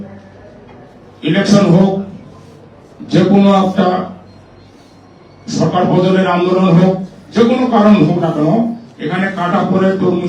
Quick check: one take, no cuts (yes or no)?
yes